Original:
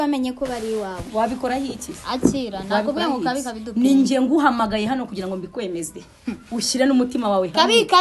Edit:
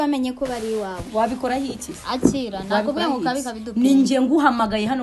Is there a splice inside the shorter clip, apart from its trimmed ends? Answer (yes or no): no